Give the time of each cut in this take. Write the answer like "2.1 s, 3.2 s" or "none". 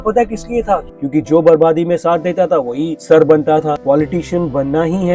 0.9 s, 3.8 s